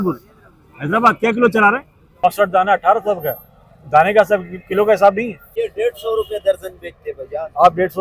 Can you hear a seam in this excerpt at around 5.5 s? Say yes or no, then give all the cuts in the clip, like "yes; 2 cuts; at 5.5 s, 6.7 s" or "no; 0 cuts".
yes; 2 cuts; at 2.2 s, 5.5 s